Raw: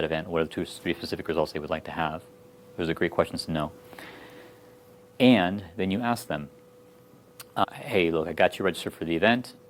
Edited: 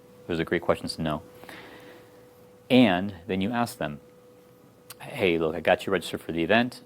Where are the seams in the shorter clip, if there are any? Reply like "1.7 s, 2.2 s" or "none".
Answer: 5.0 s